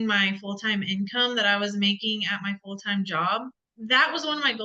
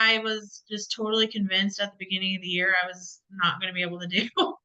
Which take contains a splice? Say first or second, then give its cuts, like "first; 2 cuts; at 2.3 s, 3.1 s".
first; 1 cut; at 3.5 s